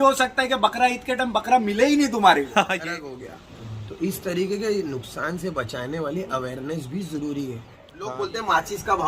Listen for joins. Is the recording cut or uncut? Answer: cut